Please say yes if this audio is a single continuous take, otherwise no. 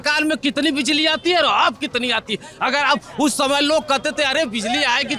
yes